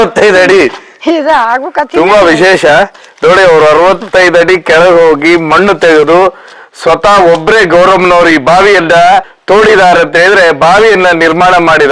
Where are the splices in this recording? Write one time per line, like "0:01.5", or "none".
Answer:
0:09.3